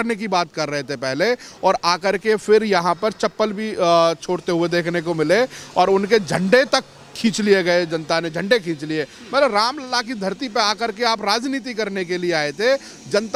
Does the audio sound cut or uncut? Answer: uncut